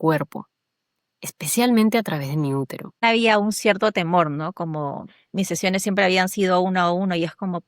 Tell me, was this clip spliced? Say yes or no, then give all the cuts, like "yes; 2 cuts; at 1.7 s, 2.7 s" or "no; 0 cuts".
yes; 1 cut; at 3.0 s